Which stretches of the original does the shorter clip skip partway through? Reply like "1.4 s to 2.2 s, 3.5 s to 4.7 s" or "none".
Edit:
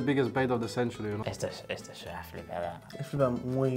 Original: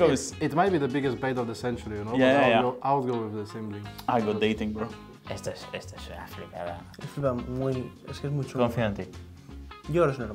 1.9 s to 5.1 s